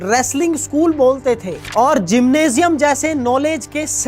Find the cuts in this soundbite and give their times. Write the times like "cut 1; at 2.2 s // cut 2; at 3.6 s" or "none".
none